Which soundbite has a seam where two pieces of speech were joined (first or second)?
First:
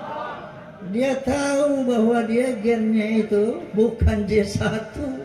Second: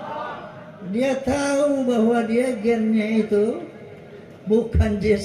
first